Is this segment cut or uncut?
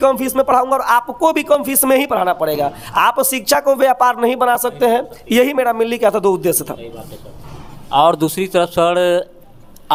uncut